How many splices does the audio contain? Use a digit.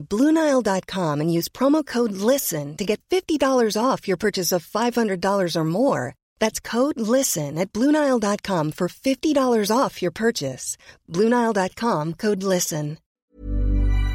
1